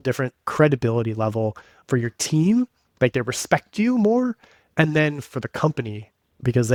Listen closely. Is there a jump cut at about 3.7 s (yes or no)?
no